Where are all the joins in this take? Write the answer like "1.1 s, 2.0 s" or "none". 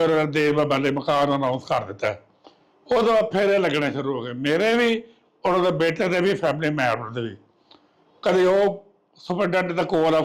none